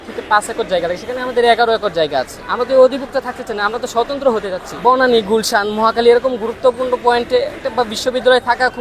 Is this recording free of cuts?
no; 2 cuts; at 2.4 s, 4.7 s

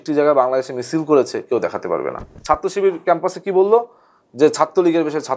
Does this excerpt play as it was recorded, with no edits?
no; 1 cut; at 2.3 s

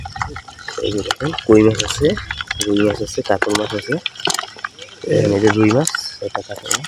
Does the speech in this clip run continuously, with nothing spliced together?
yes; 0 cuts

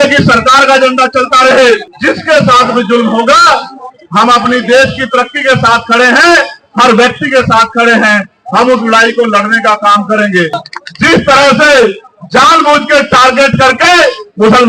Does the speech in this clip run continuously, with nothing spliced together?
no; 2 cuts; at 1.9 s, 10.6 s

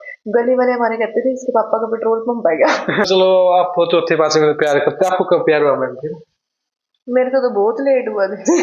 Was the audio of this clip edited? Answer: yes; 1 cut; at 3.1 s

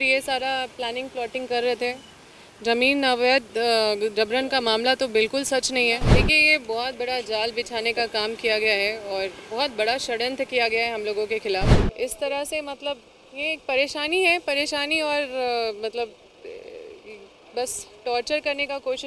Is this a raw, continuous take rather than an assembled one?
no; 2 cuts; at 6.1 s, 11.8 s

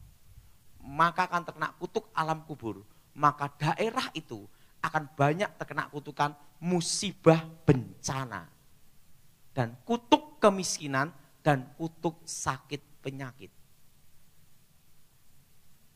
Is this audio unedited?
yes; 0 cuts

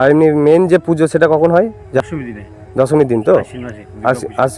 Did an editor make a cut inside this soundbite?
no; 0 cuts

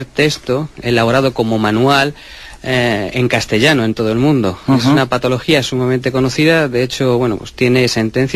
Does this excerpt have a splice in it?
no; 0 cuts

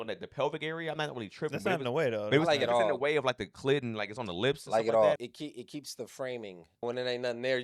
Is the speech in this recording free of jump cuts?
no; 2 cuts; at 5.2 s, 6.8 s

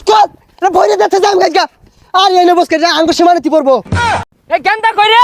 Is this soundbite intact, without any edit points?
no; 1 cut; at 4.2 s

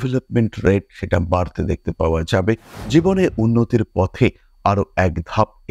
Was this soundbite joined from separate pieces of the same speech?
no; 0 cuts

